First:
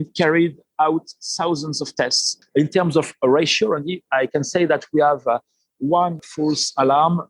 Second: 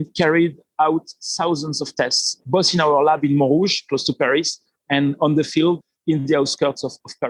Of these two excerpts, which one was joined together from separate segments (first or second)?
first